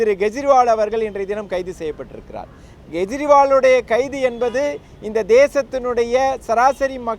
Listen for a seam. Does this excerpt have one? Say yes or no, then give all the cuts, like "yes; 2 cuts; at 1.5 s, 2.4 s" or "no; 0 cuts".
no; 0 cuts